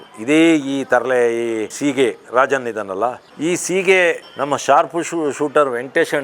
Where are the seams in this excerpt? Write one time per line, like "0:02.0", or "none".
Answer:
0:01.7
0:03.2